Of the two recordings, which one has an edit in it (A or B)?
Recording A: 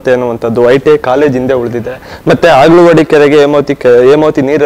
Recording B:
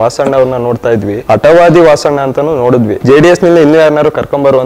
B